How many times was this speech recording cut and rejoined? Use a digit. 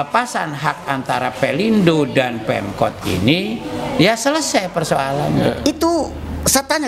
1